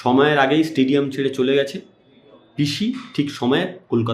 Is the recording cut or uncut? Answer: uncut